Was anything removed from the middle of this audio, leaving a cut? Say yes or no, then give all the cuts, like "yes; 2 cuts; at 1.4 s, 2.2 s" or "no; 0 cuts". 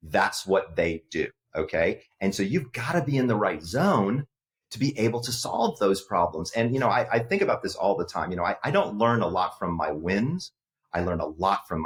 no; 0 cuts